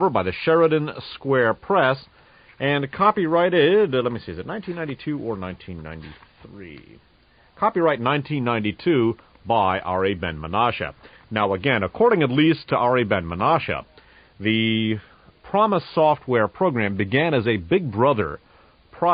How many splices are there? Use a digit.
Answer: 1